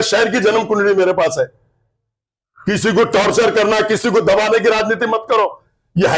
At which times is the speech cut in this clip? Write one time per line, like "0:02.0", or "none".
none

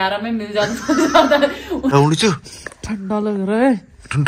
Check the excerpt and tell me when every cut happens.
0:01.9

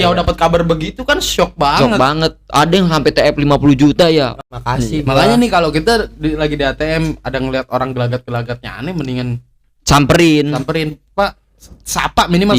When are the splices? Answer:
0:04.4

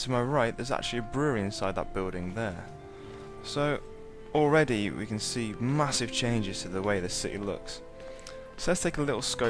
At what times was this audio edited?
none

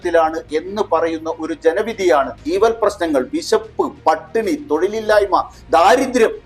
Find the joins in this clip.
0:02.4

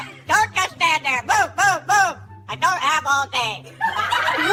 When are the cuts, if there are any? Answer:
none

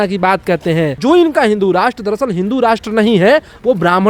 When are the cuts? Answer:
0:00.9

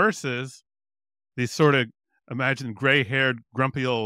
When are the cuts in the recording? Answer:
none

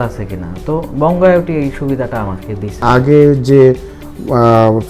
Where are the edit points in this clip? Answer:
0:02.8

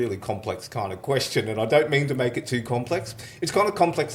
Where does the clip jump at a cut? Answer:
none

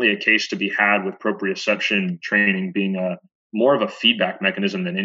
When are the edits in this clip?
0:02.1
0:03.3

